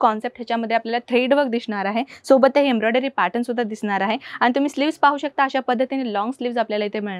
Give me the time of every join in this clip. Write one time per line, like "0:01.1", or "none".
none